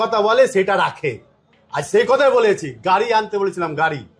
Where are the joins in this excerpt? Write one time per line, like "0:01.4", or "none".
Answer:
none